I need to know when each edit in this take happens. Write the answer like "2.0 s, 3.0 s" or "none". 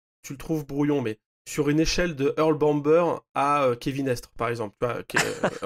none